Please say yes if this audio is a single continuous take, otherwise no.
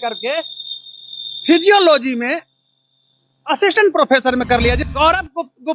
no